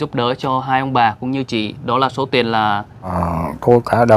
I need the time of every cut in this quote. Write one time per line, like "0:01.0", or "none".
0:03.1